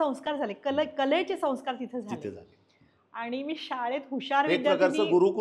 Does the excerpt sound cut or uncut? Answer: uncut